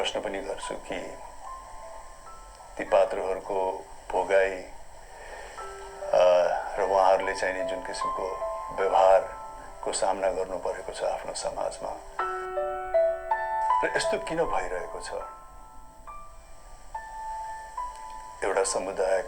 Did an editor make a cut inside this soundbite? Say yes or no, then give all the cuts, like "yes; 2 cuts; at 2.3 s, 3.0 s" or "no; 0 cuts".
no; 0 cuts